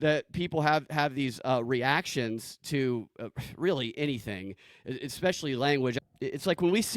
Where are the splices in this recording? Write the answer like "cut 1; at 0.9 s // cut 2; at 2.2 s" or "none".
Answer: cut 1; at 5.9 s